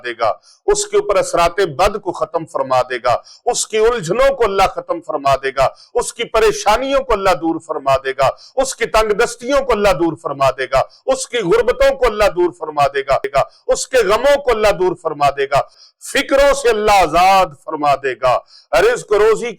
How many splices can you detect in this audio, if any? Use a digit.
2